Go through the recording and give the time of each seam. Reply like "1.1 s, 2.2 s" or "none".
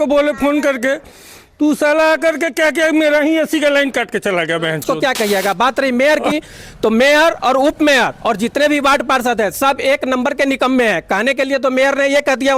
4.8 s